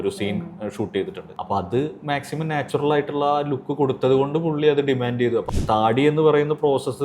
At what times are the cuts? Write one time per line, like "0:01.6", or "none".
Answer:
0:01.3
0:05.5

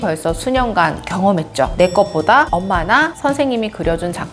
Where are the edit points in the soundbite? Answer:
none

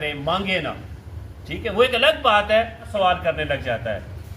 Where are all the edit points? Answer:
0:02.9

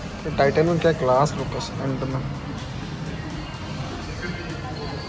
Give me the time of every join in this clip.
none

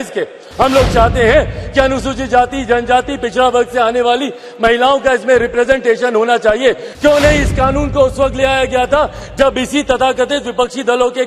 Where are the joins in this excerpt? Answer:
0:06.9

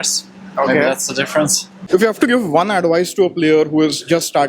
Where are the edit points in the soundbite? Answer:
0:01.7

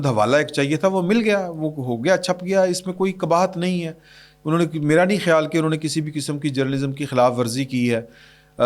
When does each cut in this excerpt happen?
none

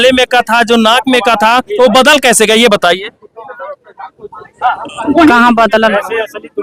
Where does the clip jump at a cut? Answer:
none

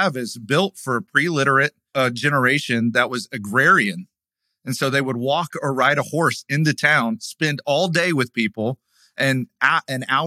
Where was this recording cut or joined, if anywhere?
0:01.8

